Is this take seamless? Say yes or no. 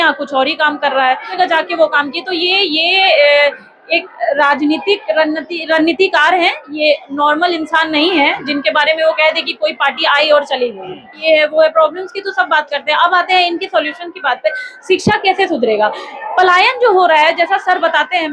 no